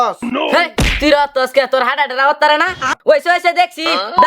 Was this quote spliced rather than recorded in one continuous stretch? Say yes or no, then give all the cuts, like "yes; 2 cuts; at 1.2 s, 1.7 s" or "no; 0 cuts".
yes; 1 cut; at 2.9 s